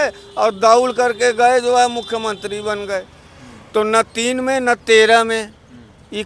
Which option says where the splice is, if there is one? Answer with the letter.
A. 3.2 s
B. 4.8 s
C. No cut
C